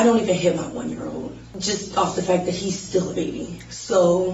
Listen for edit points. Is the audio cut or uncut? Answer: uncut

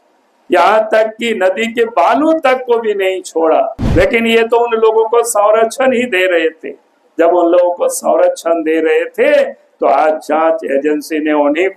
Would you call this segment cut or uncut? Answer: cut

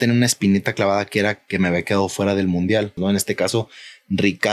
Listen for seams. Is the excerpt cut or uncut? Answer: cut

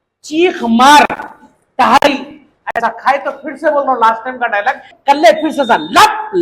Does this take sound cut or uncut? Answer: cut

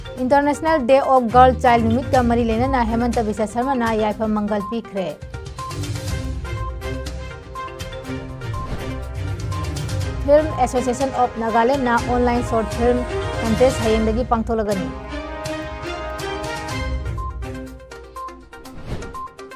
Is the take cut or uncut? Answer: uncut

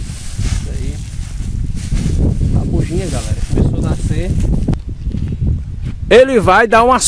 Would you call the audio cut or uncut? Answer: cut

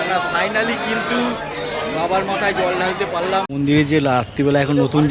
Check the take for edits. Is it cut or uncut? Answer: cut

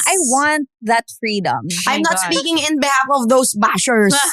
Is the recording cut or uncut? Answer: cut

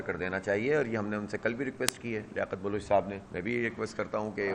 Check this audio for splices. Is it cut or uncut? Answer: cut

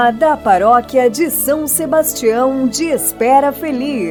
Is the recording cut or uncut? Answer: uncut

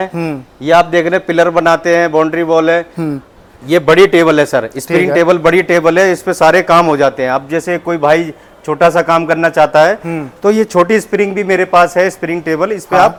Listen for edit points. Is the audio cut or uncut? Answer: uncut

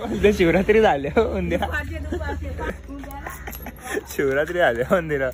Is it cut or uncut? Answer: cut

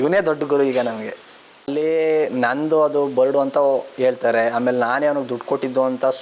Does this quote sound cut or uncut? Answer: cut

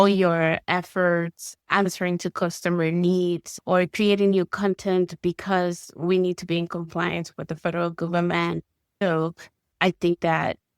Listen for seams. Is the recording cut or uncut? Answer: cut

